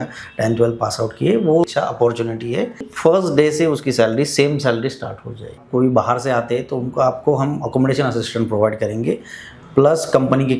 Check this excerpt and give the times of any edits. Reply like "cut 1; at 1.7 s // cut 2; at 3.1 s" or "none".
cut 1; at 1.6 s // cut 2; at 2.9 s // cut 3; at 5.5 s